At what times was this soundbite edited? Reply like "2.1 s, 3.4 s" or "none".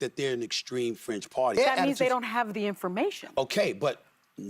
1.6 s